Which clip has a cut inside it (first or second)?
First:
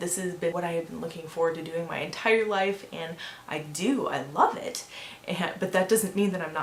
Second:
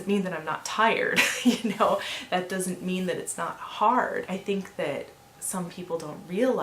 second